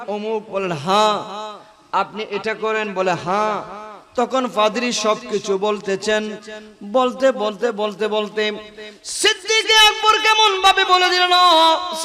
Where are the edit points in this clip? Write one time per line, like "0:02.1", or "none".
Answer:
none